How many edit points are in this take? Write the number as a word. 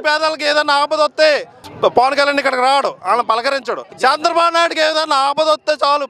one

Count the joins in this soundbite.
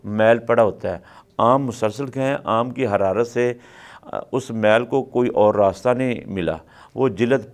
zero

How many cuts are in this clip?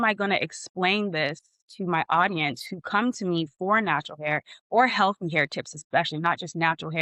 zero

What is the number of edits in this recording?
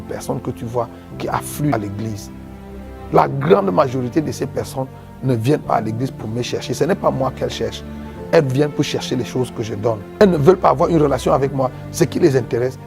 two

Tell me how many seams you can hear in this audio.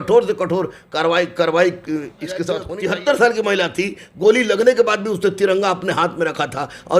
one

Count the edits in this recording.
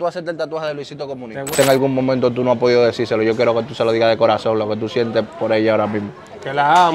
one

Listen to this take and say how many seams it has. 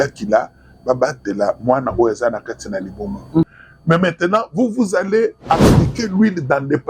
one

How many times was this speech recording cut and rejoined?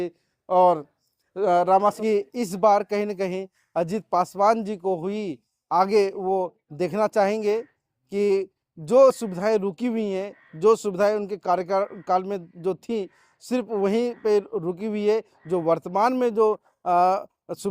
one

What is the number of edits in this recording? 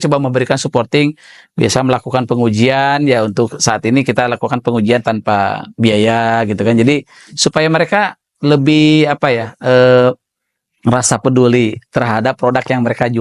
zero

